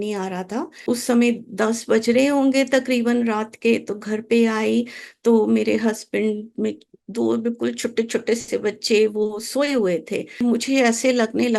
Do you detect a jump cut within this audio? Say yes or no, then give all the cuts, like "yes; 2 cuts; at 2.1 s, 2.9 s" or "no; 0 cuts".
yes; 2 cuts; at 0.8 s, 10.4 s